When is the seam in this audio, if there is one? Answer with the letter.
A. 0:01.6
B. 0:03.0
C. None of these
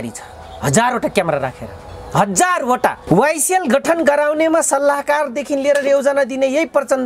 B